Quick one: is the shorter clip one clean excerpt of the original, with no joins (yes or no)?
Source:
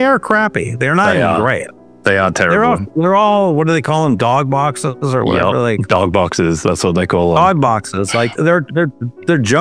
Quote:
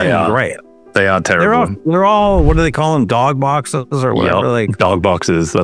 yes